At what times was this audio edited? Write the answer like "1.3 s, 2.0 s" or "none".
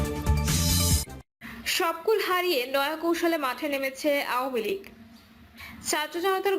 none